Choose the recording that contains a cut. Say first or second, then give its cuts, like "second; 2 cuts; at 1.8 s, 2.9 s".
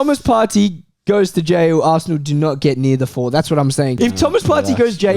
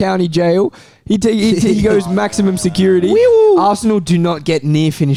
first; 1 cut; at 3.9 s